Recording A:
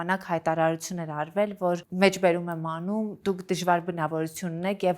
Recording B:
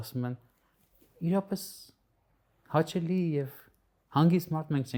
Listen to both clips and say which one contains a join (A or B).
A